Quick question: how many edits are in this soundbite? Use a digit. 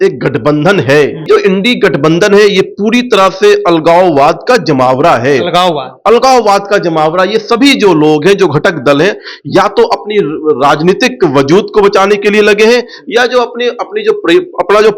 1